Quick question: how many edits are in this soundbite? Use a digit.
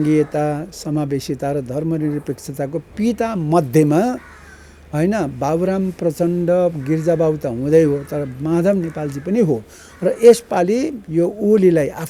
0